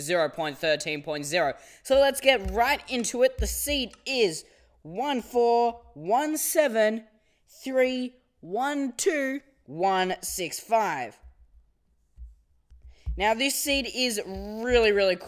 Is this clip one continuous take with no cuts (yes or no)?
yes